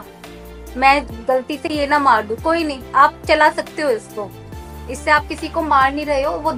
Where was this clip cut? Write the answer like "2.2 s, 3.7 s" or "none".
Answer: none